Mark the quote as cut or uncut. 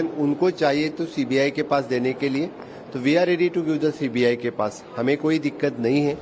uncut